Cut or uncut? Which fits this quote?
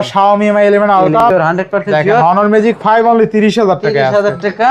cut